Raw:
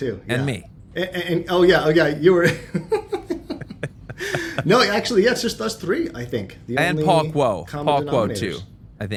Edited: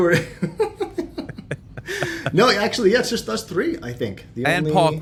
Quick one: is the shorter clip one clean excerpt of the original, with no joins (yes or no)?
yes